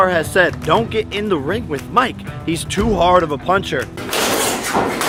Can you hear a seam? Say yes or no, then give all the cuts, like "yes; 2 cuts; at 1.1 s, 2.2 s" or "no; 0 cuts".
no; 0 cuts